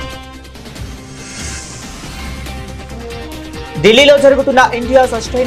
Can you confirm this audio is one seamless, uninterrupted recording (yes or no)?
no